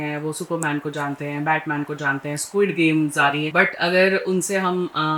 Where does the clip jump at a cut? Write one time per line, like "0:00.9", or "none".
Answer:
0:03.5